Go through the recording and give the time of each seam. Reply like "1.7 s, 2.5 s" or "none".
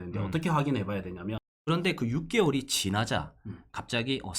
1.5 s